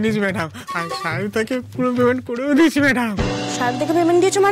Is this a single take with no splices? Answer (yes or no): yes